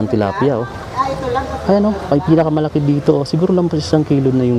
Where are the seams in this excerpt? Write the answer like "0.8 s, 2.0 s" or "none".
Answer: none